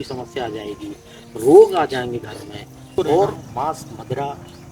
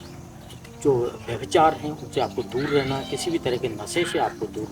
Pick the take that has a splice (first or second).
first